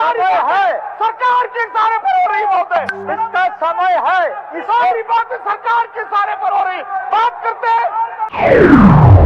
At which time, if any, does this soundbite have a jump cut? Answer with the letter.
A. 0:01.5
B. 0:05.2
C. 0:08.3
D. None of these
C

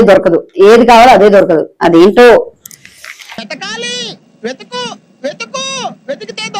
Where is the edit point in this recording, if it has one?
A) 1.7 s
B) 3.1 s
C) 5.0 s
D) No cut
D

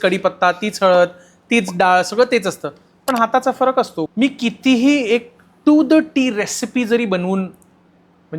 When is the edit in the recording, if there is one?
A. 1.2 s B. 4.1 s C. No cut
B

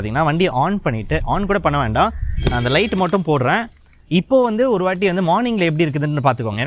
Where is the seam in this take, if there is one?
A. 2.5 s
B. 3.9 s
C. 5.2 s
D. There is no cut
D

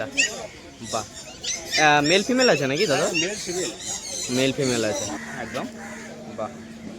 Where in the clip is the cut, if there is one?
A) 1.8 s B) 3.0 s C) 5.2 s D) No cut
C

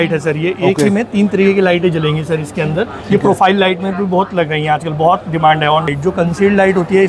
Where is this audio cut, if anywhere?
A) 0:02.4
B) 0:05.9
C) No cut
B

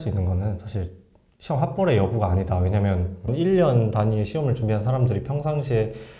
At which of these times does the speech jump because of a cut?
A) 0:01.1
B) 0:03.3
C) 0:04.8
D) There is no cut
B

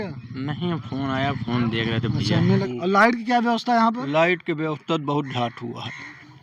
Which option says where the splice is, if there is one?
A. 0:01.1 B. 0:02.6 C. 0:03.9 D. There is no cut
B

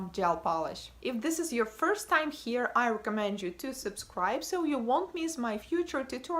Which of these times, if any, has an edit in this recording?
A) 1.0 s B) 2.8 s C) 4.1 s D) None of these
B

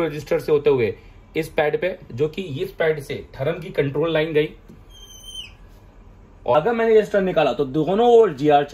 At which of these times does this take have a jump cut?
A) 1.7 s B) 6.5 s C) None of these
B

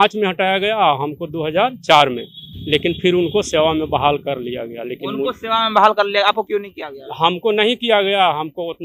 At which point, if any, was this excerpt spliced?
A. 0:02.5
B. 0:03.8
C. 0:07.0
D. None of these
D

